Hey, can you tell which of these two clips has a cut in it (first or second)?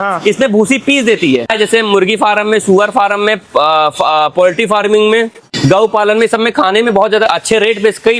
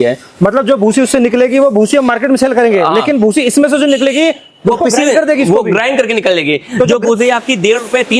first